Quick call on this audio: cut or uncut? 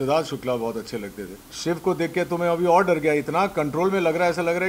cut